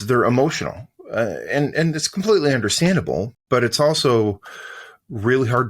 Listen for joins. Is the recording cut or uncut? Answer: cut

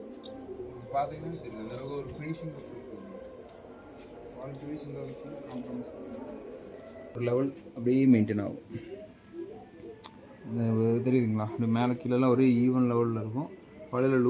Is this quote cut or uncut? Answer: cut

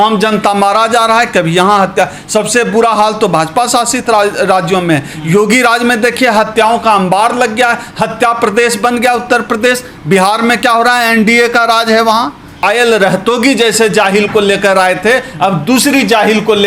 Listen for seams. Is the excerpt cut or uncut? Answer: cut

